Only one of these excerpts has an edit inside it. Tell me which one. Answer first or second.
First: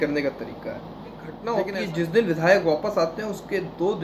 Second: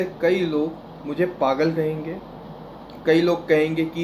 first